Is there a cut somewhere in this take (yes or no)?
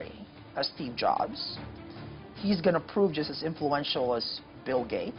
no